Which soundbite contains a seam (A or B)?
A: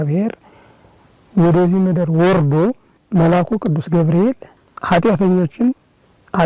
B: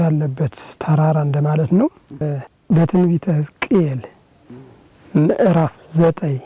B